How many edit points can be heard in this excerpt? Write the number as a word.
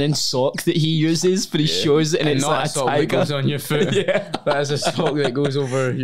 zero